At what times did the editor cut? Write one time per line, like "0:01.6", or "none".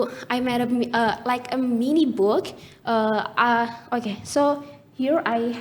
none